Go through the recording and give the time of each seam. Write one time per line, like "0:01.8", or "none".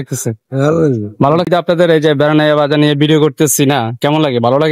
0:01.5

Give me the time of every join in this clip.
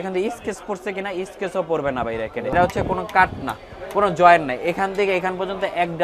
0:02.5

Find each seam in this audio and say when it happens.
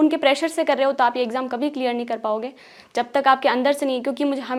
none

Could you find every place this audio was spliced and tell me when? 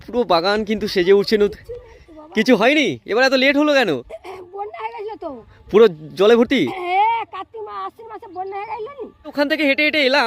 0:09.3

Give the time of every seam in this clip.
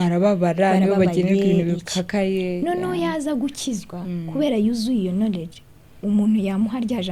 none

